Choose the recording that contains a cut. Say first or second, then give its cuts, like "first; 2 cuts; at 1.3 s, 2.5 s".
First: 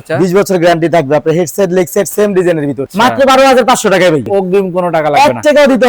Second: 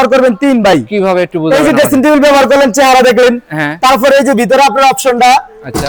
first; 2 cuts; at 2.8 s, 4.3 s